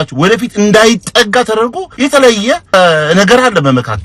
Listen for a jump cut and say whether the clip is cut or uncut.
cut